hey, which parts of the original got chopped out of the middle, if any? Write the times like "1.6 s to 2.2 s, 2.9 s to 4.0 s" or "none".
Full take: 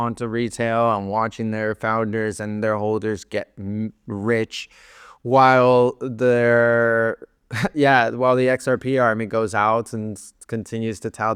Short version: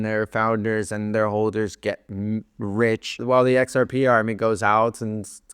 4.7 s to 8.1 s